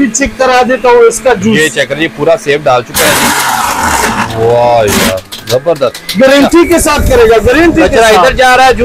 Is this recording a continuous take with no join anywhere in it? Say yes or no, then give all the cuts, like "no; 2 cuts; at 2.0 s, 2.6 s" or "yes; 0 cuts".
yes; 0 cuts